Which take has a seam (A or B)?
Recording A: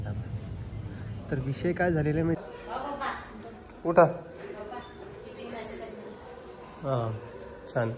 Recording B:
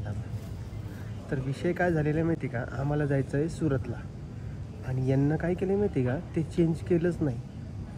A